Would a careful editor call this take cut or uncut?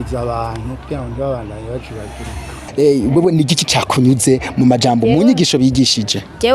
cut